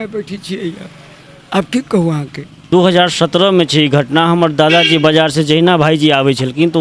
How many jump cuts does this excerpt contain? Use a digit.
1